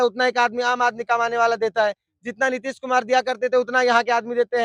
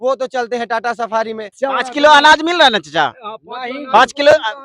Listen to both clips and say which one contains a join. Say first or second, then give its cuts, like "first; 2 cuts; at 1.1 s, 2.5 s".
second; 1 cut; at 1.5 s